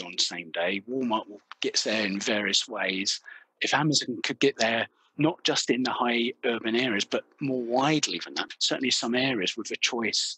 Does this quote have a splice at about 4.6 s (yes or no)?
no